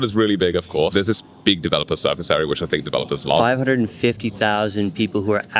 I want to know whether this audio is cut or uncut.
cut